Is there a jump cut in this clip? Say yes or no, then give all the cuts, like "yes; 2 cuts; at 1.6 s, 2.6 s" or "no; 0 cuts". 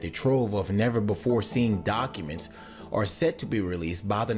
yes; 1 cut; at 2.3 s